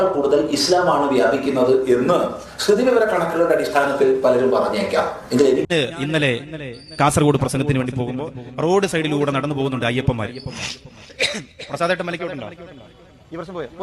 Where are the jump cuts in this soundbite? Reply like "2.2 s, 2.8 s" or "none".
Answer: 5.7 s

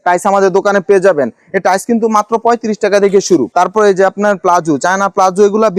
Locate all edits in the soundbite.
none

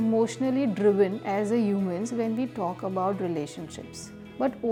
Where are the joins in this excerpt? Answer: none

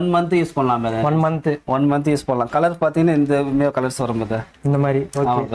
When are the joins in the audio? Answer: none

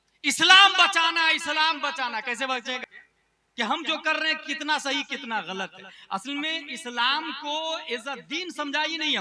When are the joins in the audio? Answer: 2.8 s

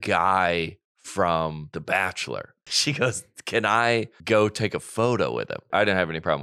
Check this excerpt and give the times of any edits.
1.6 s, 2.6 s, 4.1 s, 5.7 s

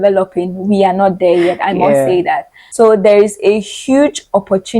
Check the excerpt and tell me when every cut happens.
2.6 s

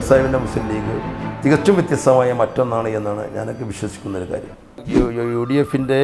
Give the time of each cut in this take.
4.9 s

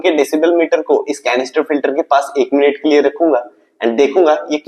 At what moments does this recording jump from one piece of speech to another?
none

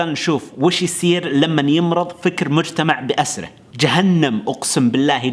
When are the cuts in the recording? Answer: none

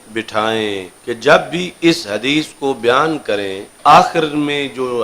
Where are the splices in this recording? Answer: 0.9 s, 3.7 s

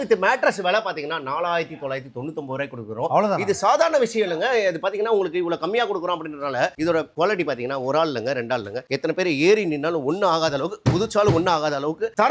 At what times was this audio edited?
none

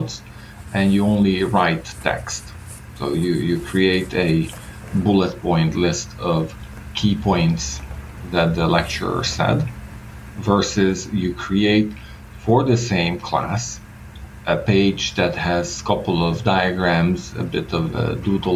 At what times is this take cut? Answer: none

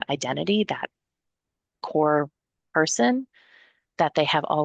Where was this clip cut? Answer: none

